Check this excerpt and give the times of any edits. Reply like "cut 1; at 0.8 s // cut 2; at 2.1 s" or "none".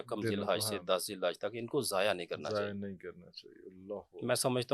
none